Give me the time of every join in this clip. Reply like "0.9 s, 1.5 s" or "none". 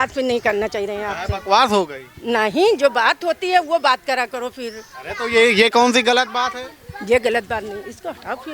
none

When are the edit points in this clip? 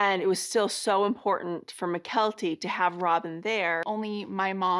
3.8 s

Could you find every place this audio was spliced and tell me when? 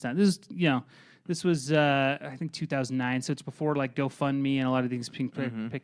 none

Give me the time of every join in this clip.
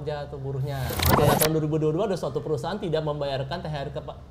1.1 s

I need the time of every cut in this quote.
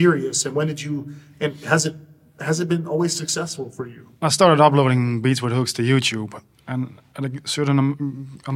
4.1 s

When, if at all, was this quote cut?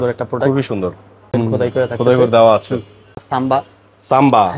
1.3 s, 3.2 s

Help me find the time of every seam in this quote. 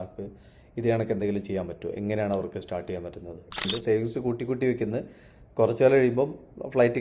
3.7 s

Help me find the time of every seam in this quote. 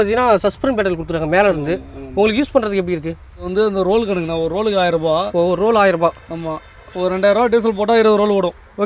3.5 s

